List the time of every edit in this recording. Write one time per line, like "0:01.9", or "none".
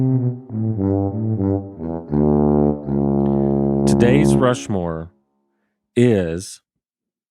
none